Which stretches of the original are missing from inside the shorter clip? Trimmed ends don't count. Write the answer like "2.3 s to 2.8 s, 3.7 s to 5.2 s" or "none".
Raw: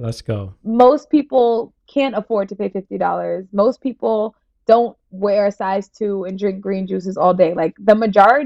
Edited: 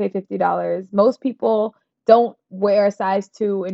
none